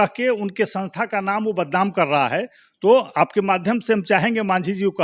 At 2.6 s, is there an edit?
no; 0 cuts

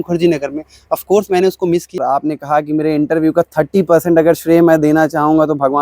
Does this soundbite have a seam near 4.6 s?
no; 1 cut; at 2.0 s

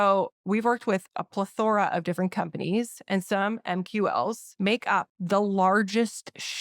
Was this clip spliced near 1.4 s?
no; 1 cut; at 4.9 s

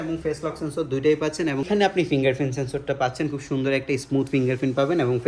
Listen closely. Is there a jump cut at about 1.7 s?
yes; 1 cut; at 1.7 s

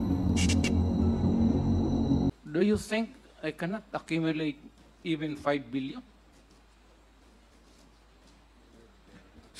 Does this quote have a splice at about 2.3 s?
yes; 1 cut; at 2.3 s

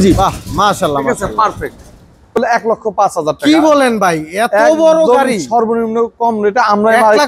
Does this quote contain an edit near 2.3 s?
yes; 1 cut; at 2.3 s

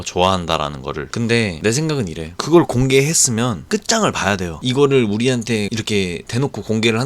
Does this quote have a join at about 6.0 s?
no; 1 cut; at 4.5 s

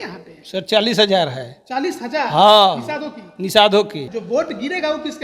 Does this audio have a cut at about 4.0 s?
yes; 1 cut; at 4.0 s

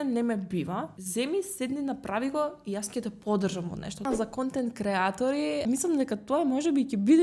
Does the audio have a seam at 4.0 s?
yes; 3 cuts; at 1.0 s, 4.0 s, 5.6 s

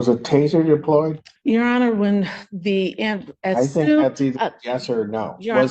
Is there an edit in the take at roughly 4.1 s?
no; 1 cut; at 1.3 s

